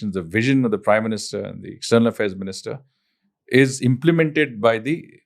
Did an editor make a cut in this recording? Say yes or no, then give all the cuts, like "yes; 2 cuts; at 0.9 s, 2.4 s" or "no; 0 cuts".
no; 0 cuts